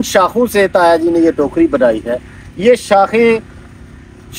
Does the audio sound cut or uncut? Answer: uncut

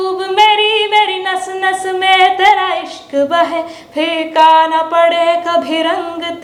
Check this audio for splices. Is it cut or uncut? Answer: uncut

